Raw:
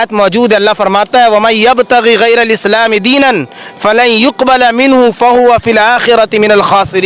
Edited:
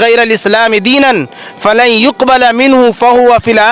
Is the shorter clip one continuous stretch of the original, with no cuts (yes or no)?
yes